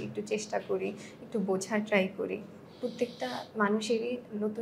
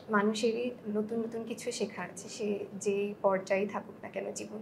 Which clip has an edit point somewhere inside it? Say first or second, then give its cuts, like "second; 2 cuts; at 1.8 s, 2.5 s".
first; 1 cut; at 2.6 s